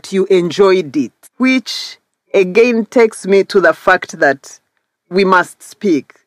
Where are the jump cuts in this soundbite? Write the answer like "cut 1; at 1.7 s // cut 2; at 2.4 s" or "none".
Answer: cut 1; at 1.2 s